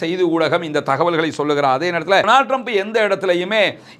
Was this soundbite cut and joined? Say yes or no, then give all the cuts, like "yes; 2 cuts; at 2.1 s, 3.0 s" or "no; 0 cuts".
yes; 1 cut; at 2.3 s